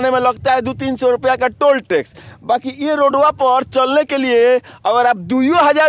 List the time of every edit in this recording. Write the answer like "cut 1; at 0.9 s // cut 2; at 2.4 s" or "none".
none